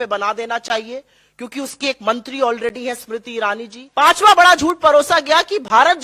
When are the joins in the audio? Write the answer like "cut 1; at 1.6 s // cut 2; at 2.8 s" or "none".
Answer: cut 1; at 3.8 s